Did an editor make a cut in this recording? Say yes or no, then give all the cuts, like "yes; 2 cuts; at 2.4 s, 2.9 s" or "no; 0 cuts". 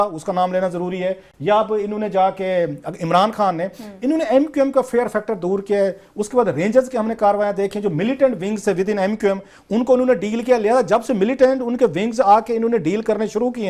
no; 0 cuts